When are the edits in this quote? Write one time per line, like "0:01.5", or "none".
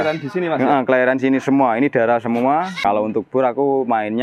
0:02.7

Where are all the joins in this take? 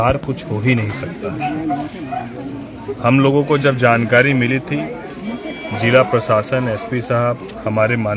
none

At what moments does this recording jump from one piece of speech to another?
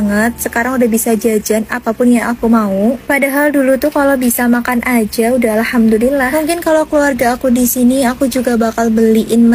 none

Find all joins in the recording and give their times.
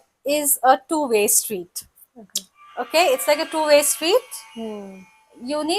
none

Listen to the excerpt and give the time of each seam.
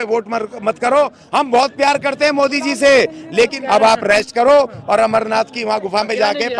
0:01.2
0:03.6

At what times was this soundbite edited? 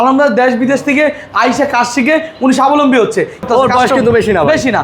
0:03.4

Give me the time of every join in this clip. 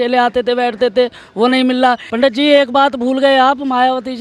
0:02.1

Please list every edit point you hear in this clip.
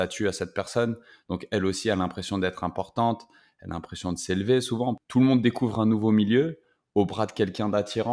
0:05.0

